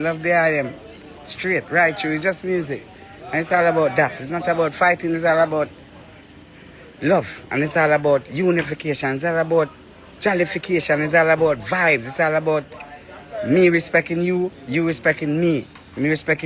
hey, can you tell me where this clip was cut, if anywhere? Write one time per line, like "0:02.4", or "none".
none